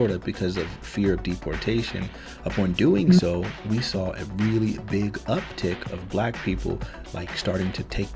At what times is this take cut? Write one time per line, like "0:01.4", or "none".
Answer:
none